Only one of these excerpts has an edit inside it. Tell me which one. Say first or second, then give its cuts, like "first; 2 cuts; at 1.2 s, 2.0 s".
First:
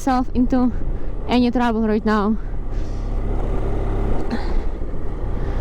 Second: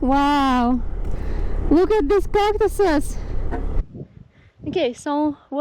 second; 1 cut; at 3.9 s